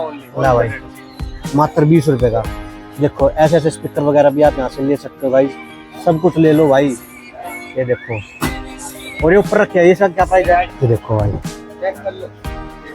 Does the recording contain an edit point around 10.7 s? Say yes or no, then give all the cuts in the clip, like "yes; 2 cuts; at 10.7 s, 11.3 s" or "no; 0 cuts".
yes; 1 cut; at 10.7 s